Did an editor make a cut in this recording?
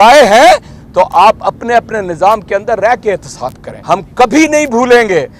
yes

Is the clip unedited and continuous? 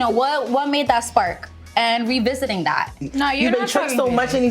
no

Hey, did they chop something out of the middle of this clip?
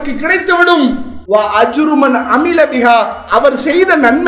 yes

